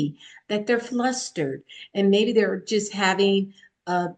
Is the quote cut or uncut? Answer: uncut